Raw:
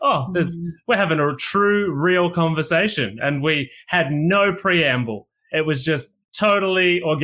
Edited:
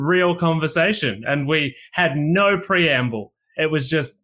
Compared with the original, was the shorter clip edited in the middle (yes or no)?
no